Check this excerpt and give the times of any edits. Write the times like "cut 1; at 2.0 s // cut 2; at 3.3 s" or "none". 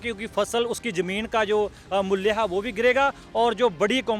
none